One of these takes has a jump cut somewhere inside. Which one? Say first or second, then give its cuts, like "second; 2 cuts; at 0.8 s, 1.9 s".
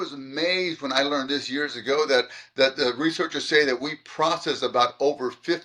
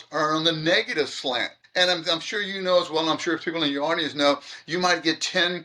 second; 1 cut; at 1.6 s